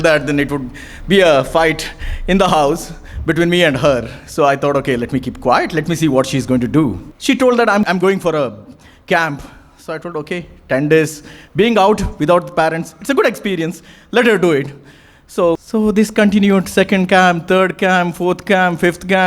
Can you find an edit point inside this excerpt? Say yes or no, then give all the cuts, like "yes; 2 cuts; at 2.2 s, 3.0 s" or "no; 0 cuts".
yes; 3 cuts; at 7.1 s, 7.8 s, 15.6 s